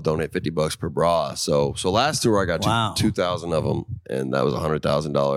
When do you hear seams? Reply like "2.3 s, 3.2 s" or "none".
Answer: none